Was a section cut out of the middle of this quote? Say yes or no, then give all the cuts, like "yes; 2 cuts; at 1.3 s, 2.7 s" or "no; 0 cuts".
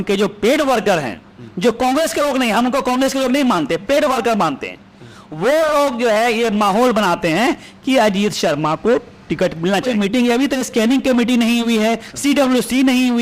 yes; 1 cut; at 9.9 s